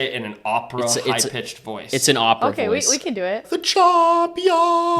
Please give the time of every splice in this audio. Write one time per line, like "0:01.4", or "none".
0:03.5